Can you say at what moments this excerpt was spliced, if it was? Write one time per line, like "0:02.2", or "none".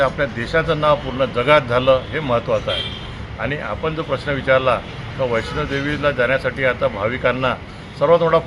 none